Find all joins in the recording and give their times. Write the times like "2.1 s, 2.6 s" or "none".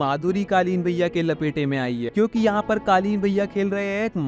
none

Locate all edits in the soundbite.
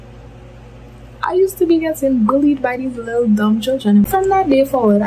4.0 s

